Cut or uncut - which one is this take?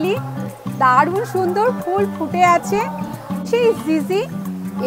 cut